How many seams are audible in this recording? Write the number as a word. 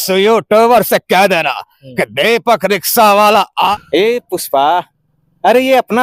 one